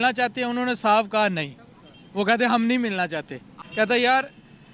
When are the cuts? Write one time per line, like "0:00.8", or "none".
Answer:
0:03.6